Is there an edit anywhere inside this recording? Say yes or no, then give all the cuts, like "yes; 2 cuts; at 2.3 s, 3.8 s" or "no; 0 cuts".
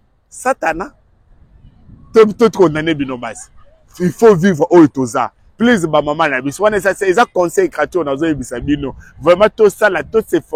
no; 0 cuts